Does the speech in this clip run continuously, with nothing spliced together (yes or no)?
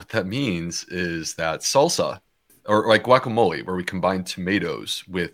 no